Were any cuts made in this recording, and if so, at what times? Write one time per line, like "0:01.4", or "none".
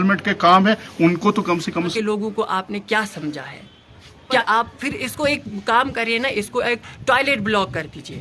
0:01.9
0:04.4